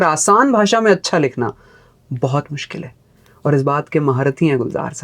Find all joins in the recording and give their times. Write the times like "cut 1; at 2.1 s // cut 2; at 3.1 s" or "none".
none